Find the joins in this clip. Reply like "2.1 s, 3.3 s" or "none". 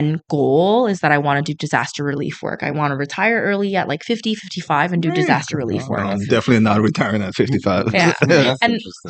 none